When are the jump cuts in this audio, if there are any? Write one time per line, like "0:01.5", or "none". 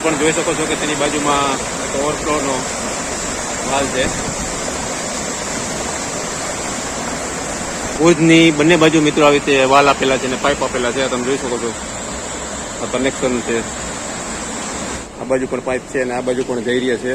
0:08.0
0:15.0